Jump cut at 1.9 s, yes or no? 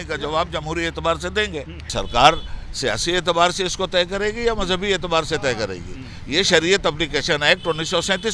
yes